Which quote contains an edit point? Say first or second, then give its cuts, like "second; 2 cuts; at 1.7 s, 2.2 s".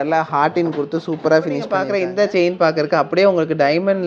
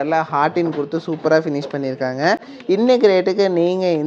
first; 1 cut; at 1.8 s